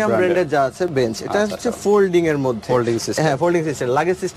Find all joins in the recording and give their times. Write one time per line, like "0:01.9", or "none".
none